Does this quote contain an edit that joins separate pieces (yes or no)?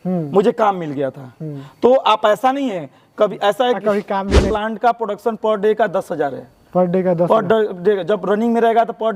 yes